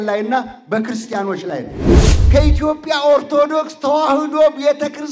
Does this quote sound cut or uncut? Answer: cut